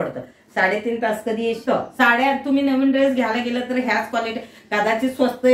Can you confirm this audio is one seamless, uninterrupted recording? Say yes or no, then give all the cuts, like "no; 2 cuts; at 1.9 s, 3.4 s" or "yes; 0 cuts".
no; 1 cut; at 1.6 s